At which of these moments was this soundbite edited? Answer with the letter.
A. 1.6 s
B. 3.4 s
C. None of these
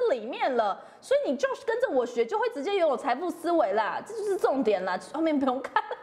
C